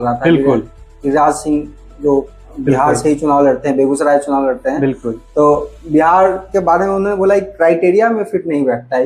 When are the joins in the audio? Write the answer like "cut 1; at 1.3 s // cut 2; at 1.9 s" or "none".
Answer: none